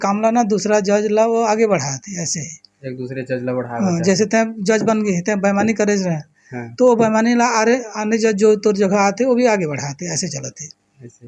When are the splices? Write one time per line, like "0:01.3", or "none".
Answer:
none